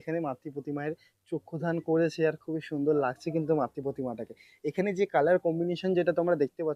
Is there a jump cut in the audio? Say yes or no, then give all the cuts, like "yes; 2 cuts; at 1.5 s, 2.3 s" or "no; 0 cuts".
no; 0 cuts